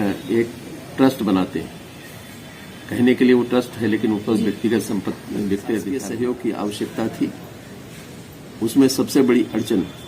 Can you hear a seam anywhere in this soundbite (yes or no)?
yes